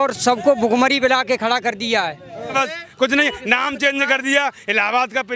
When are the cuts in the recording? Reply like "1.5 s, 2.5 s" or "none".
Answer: 2.5 s